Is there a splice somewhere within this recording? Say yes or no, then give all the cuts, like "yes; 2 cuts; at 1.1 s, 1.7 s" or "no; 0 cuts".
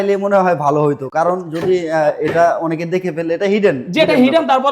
no; 0 cuts